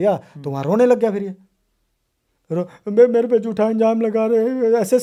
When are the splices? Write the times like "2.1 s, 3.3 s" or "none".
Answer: none